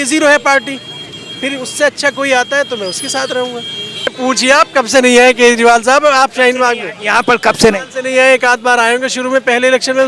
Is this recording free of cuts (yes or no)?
no